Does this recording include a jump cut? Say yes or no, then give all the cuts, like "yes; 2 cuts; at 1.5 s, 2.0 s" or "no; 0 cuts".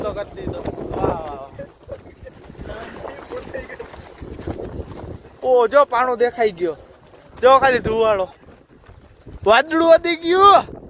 no; 0 cuts